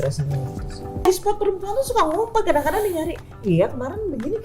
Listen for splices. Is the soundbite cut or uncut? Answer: cut